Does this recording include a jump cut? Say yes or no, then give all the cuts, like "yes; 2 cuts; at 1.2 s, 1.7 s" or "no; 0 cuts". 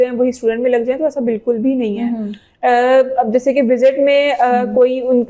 no; 0 cuts